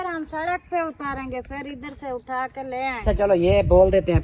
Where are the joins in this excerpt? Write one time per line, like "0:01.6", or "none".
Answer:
0:03.0